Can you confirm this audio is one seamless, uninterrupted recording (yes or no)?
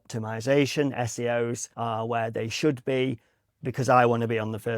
no